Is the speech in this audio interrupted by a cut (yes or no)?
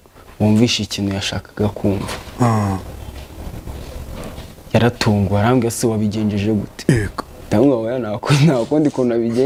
no